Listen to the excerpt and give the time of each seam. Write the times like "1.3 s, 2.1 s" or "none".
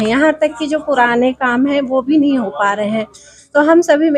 none